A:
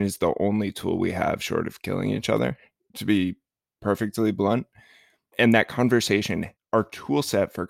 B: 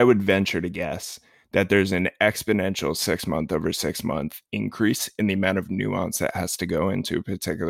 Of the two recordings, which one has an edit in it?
A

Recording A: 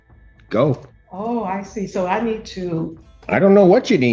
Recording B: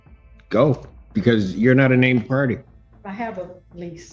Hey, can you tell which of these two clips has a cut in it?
A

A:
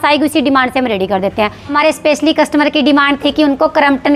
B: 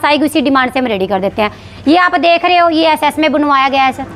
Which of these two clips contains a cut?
A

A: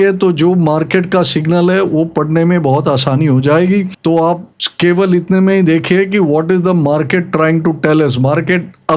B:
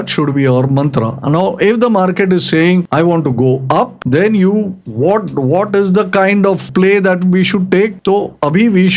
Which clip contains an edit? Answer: B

